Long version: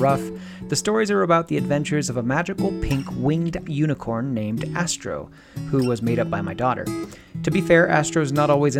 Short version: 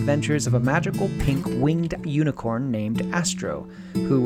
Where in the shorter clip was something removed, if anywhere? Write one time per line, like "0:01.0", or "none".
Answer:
none